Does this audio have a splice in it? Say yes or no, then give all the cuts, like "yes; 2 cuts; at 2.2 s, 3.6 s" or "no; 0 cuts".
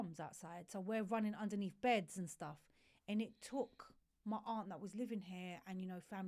no; 0 cuts